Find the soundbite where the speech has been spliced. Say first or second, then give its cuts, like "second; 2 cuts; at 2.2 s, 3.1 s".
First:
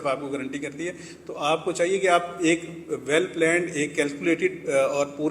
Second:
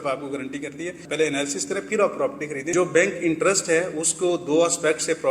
second; 2 cuts; at 1.0 s, 2.7 s